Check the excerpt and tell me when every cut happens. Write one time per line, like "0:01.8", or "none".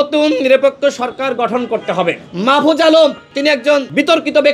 0:02.2
0:03.6